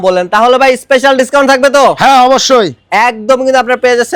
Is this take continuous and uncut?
yes; 0 cuts

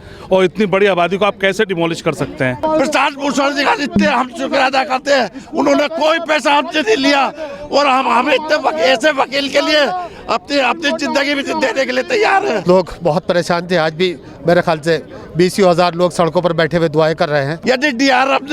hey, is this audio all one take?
no; 3 cuts; at 2.6 s, 12.6 s, 17.5 s

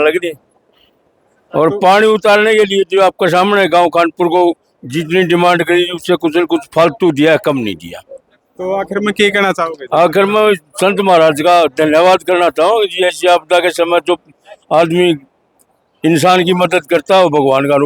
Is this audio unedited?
yes; 0 cuts

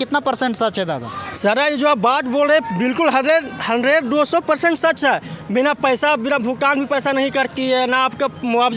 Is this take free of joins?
yes; 0 cuts

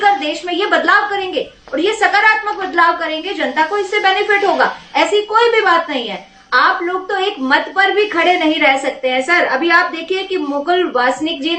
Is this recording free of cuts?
yes; 0 cuts

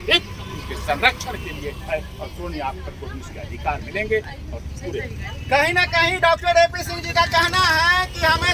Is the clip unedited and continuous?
yes; 0 cuts

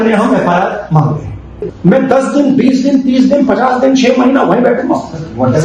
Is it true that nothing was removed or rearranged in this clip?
no; 1 cut; at 1.6 s

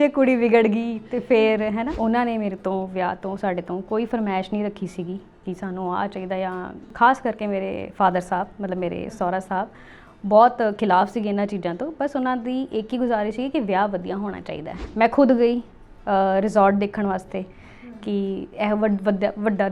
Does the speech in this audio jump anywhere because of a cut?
yes; 3 cuts; at 1.9 s, 6.9 s, 14.8 s

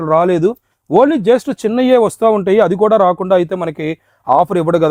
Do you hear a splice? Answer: no; 0 cuts

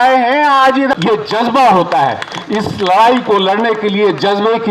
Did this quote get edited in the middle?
yes; 1 cut; at 0.9 s

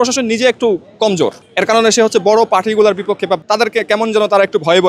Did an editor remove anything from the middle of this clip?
yes; 2 cuts; at 1.4 s, 3.4 s

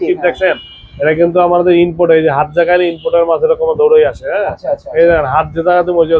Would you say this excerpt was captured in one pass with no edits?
yes; 0 cuts

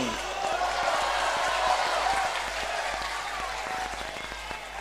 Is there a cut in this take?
no; 0 cuts

